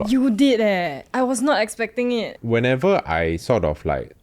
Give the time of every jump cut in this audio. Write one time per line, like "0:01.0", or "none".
0:02.4